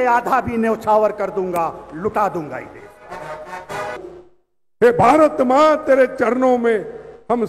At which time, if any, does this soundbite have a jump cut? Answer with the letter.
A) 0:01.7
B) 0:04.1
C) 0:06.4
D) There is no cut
B